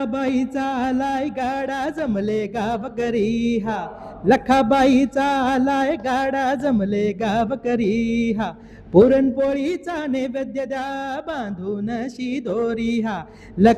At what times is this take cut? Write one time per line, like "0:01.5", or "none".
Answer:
none